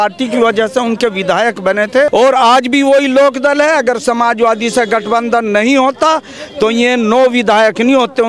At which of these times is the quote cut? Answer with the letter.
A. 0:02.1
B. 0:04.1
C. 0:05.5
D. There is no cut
A